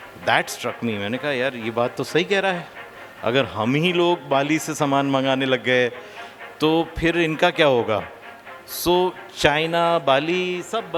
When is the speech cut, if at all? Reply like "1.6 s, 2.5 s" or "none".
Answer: none